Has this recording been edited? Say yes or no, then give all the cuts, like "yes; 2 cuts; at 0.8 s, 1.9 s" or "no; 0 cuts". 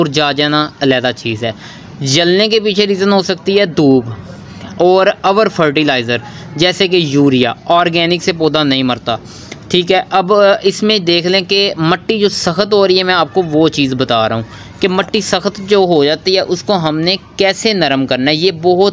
no; 0 cuts